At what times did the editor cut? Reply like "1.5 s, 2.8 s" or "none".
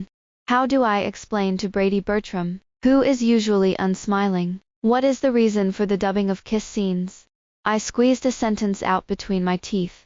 none